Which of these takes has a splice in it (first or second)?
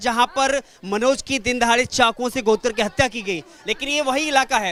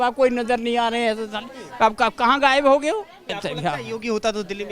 second